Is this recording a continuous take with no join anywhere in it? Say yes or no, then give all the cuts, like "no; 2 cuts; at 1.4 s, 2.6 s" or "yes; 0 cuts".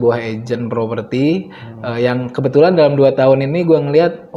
yes; 0 cuts